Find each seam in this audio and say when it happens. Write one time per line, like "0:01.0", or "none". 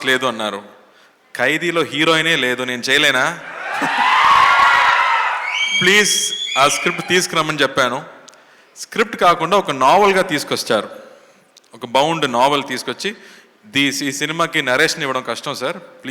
none